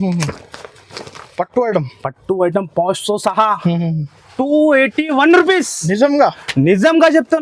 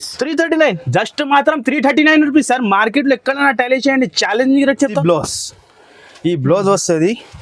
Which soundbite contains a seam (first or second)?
second